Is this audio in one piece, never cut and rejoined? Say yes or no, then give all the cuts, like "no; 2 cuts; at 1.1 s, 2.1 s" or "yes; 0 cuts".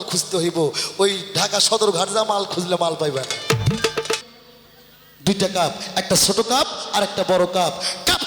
no; 1 cut; at 4.2 s